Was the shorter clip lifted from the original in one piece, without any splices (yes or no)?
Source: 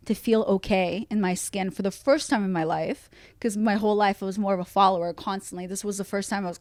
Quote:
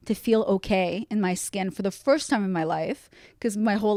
yes